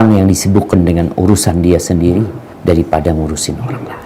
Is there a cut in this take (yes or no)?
yes